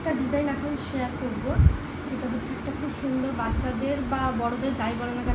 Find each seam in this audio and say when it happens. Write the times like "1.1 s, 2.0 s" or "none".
none